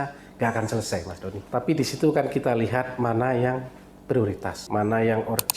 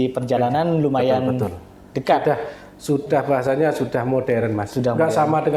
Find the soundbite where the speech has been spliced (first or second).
first